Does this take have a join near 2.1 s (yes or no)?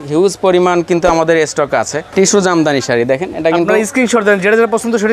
yes